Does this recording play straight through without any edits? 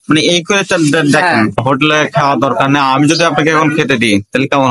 no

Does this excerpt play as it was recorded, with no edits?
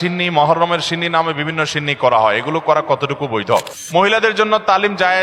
no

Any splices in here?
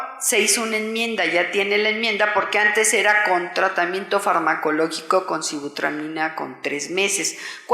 yes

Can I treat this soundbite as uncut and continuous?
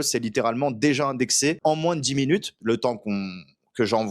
no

